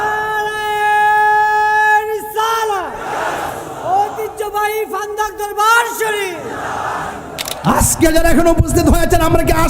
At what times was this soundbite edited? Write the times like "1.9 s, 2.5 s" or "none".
7.5 s